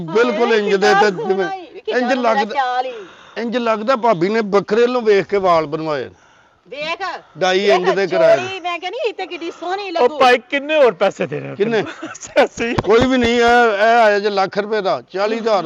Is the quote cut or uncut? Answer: uncut